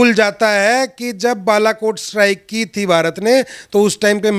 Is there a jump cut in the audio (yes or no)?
no